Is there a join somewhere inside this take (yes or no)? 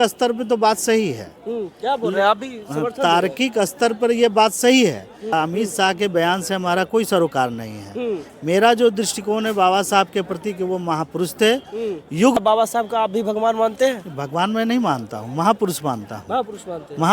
yes